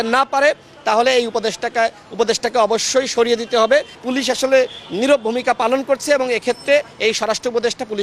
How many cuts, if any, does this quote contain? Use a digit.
1